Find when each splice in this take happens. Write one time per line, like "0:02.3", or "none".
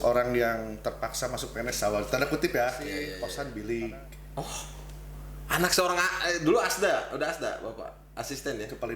0:03.1